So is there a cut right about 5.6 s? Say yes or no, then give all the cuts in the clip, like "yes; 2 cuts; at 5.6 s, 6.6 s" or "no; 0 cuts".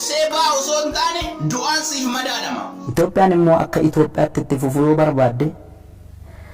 no; 1 cut; at 2.8 s